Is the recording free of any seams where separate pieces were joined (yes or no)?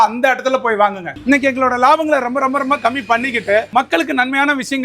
no